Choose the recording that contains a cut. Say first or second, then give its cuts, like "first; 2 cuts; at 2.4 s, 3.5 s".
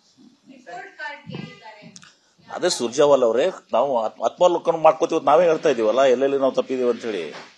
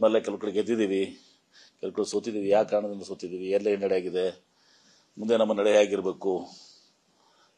second; 1 cut; at 1.4 s